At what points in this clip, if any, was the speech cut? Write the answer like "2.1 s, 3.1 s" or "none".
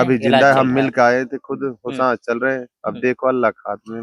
none